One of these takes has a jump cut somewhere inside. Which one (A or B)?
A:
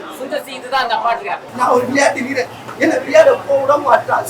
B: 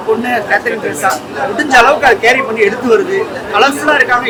A